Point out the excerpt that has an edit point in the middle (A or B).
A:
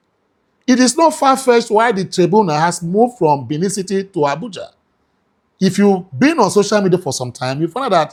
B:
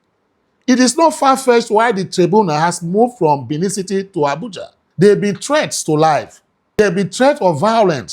B